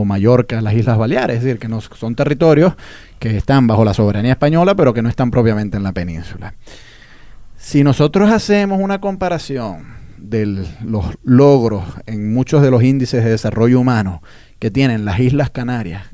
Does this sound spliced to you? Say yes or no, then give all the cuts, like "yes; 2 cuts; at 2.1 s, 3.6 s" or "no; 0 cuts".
yes; 1 cut; at 13.2 s